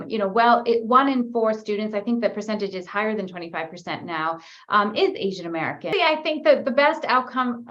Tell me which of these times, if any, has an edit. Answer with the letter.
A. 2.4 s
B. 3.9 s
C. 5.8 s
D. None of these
C